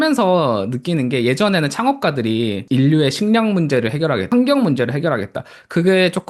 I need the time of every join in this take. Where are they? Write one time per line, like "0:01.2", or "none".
0:02.6
0:04.3